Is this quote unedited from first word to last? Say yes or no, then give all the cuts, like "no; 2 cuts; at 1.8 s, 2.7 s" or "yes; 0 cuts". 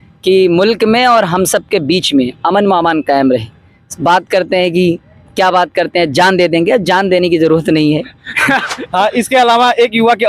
no; 1 cut; at 8.7 s